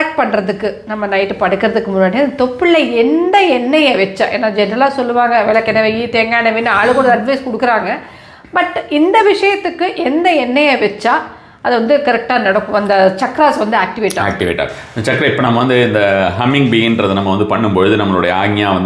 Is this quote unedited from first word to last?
yes; 0 cuts

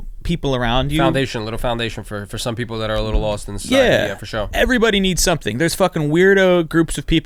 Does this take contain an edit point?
no; 0 cuts

